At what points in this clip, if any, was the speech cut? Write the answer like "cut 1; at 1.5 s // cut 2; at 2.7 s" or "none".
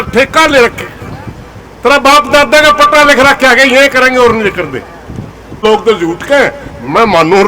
cut 1; at 5.6 s